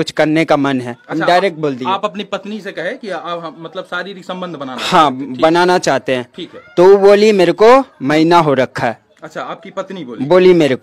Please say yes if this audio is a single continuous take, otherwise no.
yes